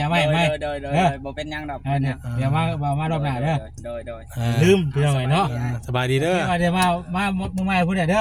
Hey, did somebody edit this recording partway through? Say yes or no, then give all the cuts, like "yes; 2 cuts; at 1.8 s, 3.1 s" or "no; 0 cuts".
no; 0 cuts